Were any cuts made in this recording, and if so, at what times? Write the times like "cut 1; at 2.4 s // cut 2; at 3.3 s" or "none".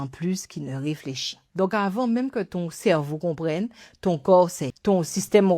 cut 1; at 1.4 s // cut 2; at 4.7 s